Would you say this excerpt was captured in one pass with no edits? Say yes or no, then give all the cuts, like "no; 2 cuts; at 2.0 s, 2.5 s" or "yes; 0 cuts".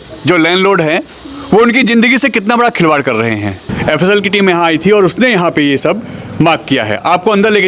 no; 1 cut; at 3.6 s